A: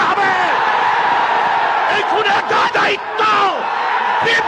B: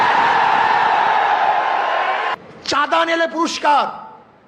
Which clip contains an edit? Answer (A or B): B